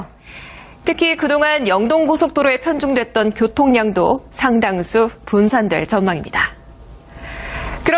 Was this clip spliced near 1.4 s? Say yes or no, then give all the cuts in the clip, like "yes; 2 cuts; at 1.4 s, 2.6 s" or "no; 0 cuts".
no; 1 cut; at 5.9 s